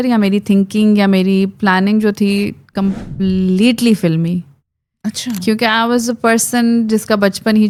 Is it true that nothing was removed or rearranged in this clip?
yes; 0 cuts

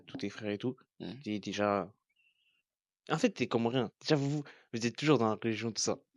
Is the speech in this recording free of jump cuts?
yes; 0 cuts

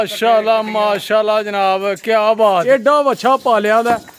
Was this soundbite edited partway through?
yes; 1 cut; at 2.6 s

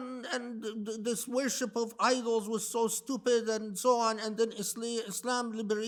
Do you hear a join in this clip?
no; 0 cuts

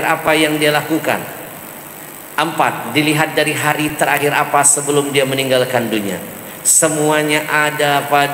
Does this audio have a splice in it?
no; 0 cuts

